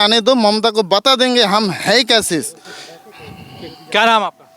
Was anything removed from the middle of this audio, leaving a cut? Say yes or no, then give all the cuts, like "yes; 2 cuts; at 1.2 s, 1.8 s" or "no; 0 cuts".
no; 0 cuts